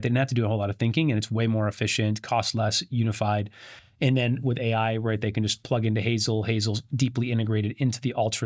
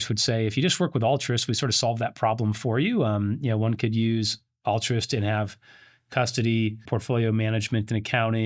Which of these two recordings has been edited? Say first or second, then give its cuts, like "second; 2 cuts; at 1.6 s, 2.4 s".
second; 1 cut; at 6.8 s